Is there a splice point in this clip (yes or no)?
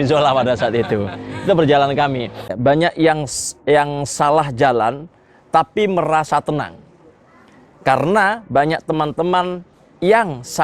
yes